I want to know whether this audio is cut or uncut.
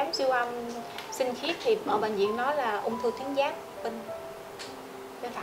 uncut